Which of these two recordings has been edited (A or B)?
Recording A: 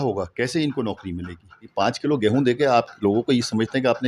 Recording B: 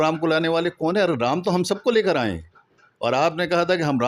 A